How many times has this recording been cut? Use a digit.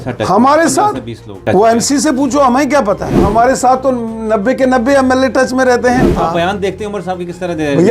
3